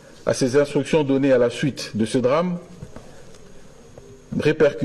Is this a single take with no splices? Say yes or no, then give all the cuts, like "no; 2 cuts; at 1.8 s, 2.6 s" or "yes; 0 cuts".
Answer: yes; 0 cuts